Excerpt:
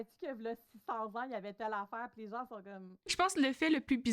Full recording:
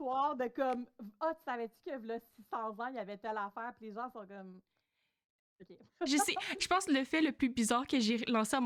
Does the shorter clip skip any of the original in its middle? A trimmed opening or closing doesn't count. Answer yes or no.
yes